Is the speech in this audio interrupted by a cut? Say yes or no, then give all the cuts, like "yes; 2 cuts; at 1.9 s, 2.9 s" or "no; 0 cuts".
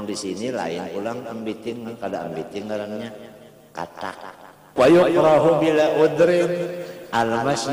yes; 1 cut; at 4.7 s